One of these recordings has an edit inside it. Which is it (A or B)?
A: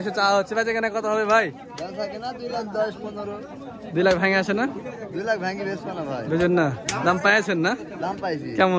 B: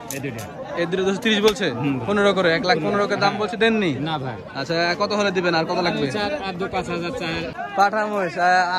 B